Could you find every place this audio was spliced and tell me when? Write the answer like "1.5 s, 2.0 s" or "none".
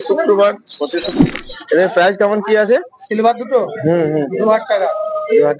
1.1 s